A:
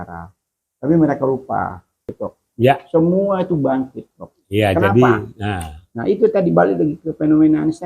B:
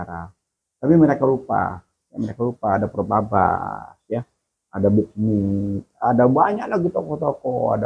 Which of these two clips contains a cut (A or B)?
A